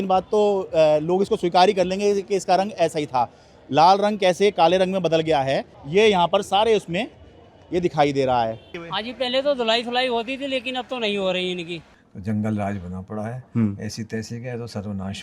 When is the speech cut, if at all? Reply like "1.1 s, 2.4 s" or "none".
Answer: 5.8 s, 8.8 s, 11.8 s